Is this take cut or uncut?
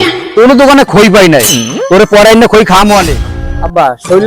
cut